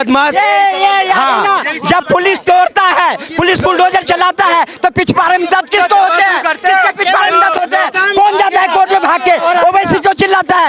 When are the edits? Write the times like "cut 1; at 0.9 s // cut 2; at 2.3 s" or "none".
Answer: none